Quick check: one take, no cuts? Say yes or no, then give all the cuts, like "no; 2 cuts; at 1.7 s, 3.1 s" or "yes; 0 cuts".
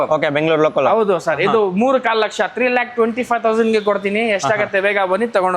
yes; 0 cuts